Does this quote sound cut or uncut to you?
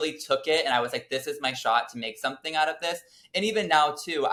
uncut